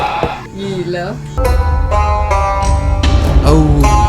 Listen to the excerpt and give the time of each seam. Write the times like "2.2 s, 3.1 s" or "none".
1.4 s